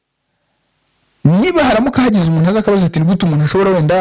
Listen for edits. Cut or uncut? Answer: uncut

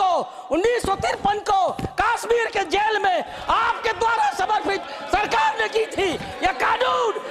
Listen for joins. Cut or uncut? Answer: uncut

